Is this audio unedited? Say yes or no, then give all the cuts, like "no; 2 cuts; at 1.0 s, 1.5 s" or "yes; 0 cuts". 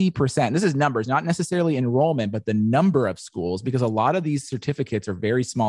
yes; 0 cuts